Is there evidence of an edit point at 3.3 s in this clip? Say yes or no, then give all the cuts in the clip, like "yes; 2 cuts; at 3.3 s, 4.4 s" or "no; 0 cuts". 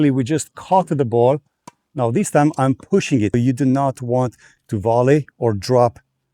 yes; 1 cut; at 3.3 s